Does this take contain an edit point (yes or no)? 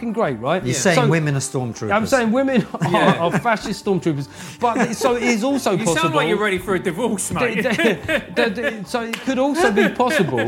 no